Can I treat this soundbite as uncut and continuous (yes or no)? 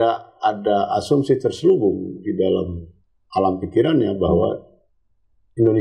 yes